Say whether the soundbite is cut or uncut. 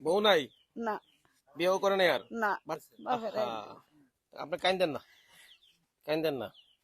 cut